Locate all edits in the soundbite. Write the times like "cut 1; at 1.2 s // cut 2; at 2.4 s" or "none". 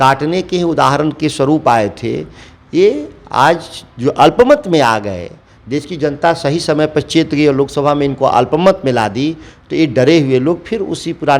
none